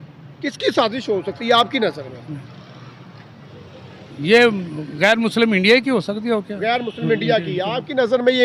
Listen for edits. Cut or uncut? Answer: uncut